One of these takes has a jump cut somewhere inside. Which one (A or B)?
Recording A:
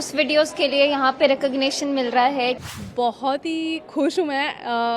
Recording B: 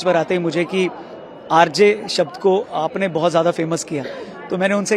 A